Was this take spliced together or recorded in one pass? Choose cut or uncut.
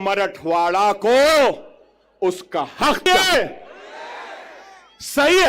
cut